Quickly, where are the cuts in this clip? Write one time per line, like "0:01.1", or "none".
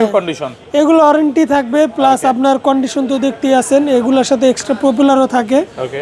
none